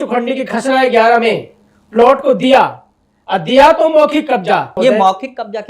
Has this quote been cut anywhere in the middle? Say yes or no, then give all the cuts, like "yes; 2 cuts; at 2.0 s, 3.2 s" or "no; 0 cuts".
yes; 1 cut; at 4.7 s